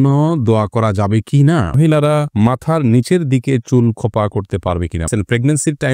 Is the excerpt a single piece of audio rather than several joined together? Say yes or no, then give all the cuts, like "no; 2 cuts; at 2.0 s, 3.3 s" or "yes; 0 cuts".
no; 2 cuts; at 1.8 s, 5.1 s